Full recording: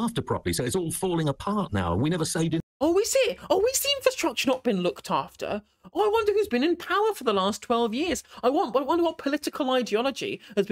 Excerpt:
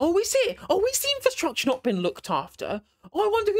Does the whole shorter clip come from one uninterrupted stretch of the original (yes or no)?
yes